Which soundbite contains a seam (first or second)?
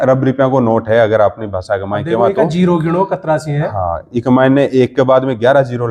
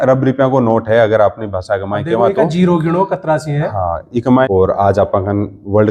second